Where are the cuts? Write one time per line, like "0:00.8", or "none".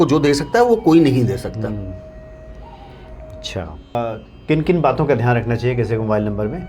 0:04.0